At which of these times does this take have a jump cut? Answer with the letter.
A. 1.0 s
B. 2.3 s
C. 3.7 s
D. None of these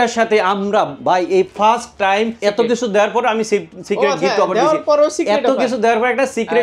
B